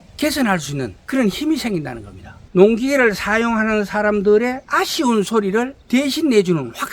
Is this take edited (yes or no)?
yes